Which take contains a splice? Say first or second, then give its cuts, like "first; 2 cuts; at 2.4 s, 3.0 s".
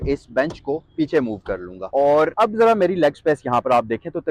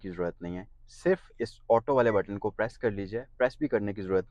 first; 2 cuts; at 1.7 s, 2.3 s